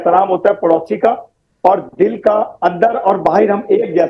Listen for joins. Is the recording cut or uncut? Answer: uncut